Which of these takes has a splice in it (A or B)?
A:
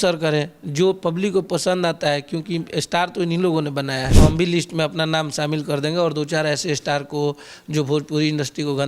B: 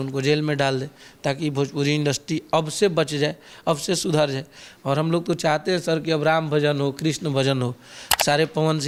A